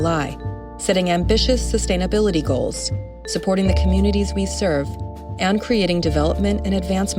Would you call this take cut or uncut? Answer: uncut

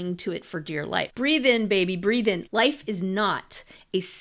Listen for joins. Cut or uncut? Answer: cut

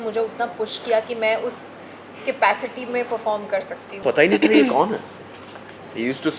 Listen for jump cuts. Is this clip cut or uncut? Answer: cut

